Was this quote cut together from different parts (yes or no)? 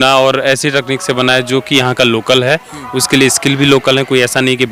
no